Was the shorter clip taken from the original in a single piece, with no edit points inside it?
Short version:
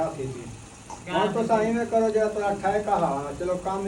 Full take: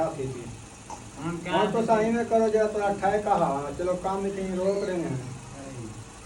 no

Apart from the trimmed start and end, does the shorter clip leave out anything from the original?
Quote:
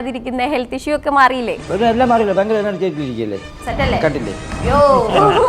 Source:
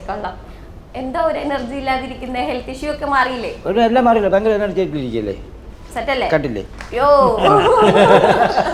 yes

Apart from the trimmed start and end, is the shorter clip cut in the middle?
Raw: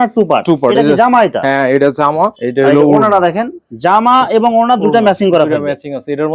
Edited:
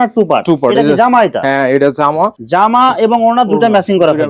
yes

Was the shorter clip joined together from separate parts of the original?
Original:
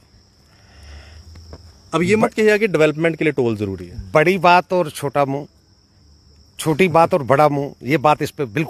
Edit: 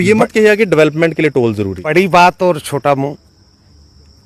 yes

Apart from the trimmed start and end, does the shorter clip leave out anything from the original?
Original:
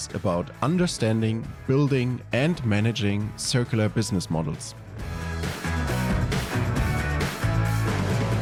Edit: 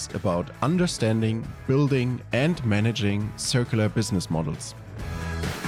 no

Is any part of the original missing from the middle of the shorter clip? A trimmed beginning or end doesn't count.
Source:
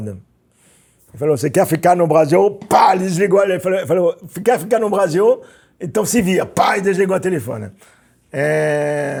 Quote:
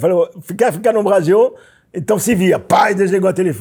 no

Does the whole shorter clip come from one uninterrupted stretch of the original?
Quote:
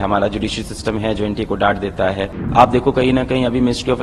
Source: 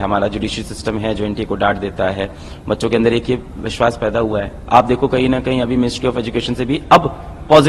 no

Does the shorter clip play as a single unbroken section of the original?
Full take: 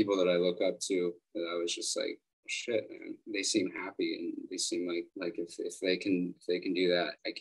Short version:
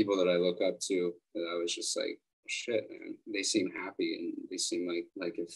yes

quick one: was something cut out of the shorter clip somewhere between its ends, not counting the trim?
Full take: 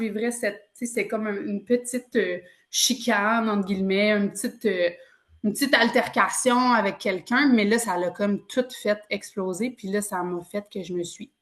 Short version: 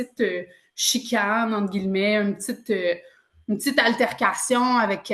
no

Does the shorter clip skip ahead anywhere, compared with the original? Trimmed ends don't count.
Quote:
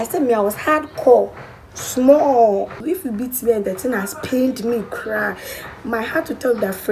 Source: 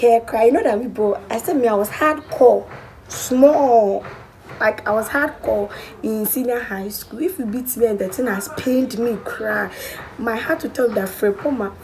yes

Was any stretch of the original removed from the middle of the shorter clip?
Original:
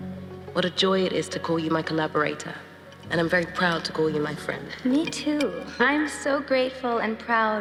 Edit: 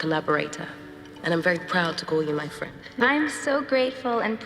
yes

